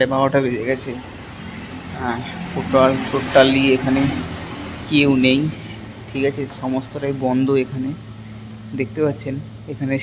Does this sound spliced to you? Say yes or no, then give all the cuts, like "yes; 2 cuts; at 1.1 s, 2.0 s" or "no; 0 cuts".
no; 0 cuts